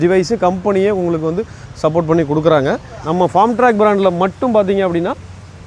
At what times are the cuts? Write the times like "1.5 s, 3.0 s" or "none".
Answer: 2.8 s

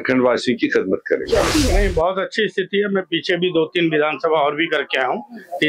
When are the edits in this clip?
1.5 s

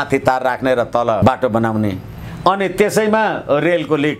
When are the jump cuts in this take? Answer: 1.2 s

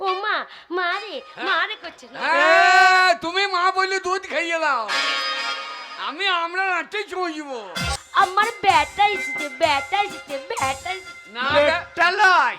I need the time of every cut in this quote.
8.0 s

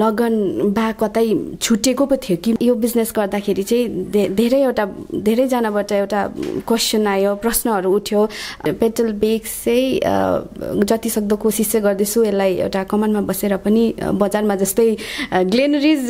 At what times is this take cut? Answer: 2.6 s, 8.6 s

